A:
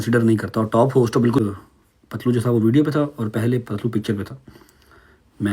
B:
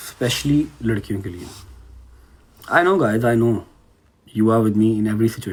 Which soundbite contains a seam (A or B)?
A